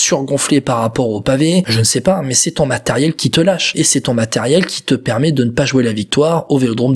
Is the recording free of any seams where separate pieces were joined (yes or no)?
no